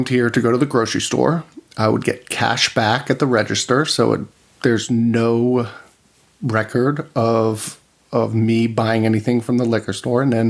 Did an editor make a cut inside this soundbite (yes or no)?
no